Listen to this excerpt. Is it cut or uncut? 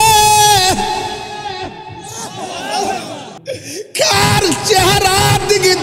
cut